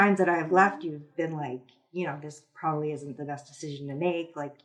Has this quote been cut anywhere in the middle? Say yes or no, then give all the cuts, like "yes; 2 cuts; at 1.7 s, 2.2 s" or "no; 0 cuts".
no; 0 cuts